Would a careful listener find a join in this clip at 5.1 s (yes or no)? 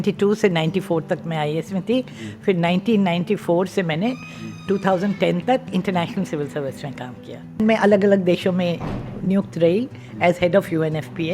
no